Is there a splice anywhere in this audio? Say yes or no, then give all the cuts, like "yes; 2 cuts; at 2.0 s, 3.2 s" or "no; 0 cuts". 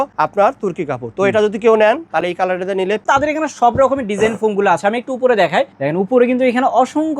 yes; 1 cut; at 3.0 s